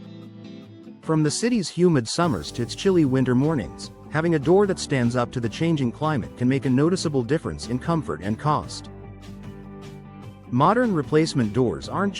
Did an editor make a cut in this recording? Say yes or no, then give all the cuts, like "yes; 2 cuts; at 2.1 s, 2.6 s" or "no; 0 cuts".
yes; 3 cuts; at 1.0 s, 8.7 s, 10.1 s